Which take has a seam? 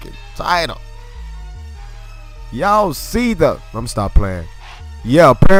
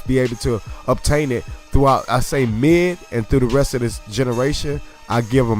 second; 1 cut; at 3.0 s

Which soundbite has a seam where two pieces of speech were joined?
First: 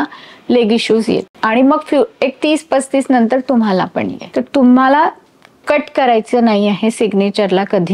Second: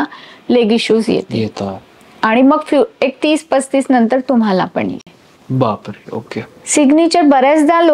first; 2 cuts; at 1.3 s, 4.2 s

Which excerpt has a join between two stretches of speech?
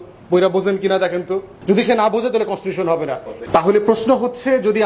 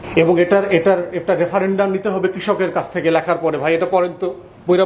first; 2 cuts; at 1.5 s, 3.3 s

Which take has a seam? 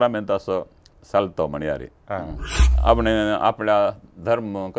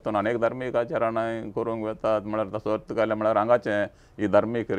first; 1 cut; at 2.7 s

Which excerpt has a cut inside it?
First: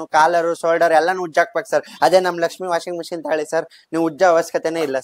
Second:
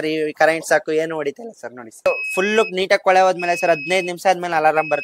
second; 1 cut; at 2.1 s

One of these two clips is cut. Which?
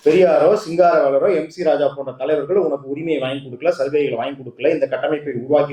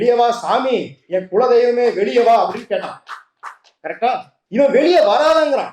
second; 1 cut; at 4.3 s

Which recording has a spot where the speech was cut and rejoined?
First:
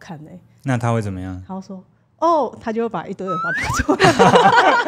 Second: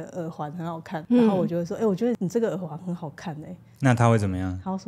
second; 2 cuts; at 1.0 s, 2.2 s

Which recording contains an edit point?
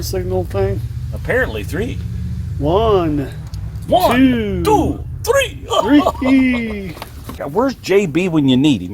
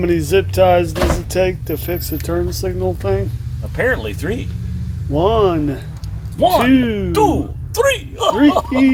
first; 1 cut; at 7.4 s

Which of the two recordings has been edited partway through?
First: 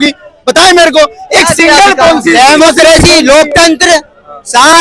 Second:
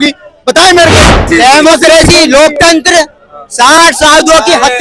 second; 1 cut; at 1.3 s

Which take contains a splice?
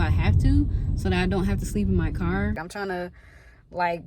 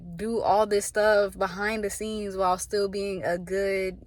first; 1 cut; at 2.7 s

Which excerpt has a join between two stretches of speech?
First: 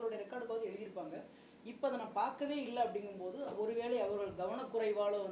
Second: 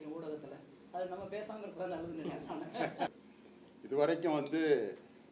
second; 1 cut; at 3.1 s

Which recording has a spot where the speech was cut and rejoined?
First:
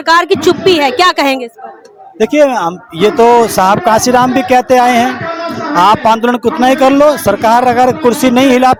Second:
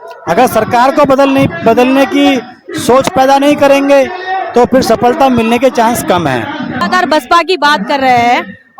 second; 1 cut; at 6.8 s

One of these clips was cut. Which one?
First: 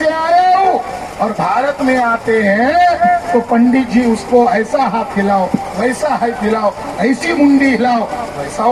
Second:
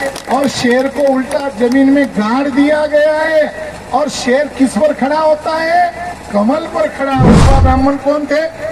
second; 1 cut; at 7.4 s

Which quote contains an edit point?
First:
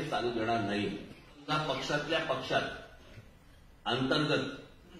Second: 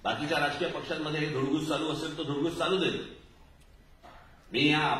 first; 1 cut; at 1.5 s

